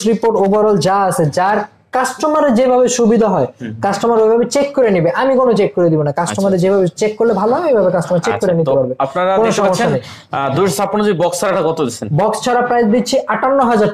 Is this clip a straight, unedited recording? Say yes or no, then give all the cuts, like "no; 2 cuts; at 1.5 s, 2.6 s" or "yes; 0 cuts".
yes; 0 cuts